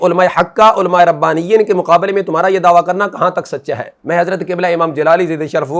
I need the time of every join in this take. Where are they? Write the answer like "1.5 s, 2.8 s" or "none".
4.0 s